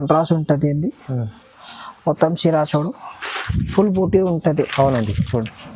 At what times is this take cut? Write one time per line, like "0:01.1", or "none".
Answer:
none